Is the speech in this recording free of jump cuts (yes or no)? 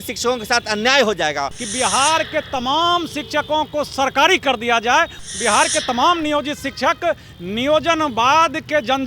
no